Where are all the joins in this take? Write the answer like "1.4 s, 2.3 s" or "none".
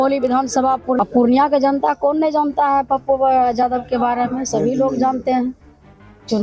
1.0 s